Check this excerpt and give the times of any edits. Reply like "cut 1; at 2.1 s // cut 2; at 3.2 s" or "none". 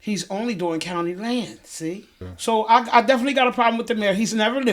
cut 1; at 2.3 s